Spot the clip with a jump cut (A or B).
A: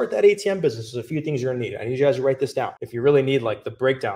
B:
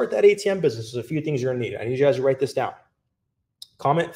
A